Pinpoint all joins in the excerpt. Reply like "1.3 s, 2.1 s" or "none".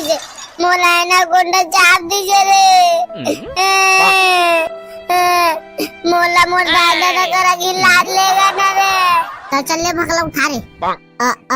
9.4 s